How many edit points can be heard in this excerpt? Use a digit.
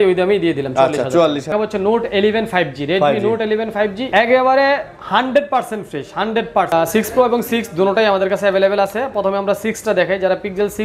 3